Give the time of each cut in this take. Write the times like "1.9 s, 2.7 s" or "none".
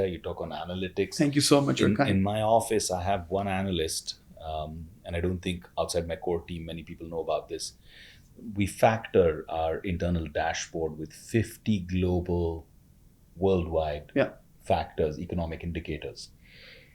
none